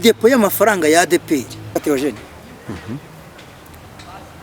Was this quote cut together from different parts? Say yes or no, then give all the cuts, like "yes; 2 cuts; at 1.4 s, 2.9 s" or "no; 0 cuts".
yes; 1 cut; at 1.8 s